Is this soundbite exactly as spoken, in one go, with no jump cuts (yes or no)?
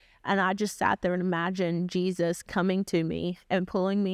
yes